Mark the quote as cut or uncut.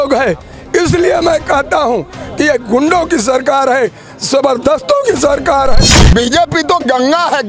cut